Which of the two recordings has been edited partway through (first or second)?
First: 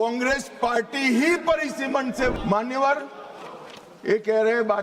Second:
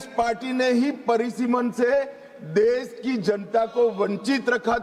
first